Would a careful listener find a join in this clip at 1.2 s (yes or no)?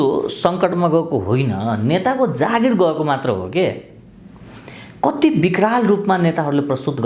no